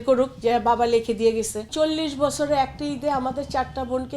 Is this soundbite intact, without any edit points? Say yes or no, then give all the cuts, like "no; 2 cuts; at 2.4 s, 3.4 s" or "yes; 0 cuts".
no; 1 cut; at 1.7 s